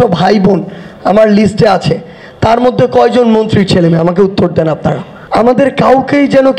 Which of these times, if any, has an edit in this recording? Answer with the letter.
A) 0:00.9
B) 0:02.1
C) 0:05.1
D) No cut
C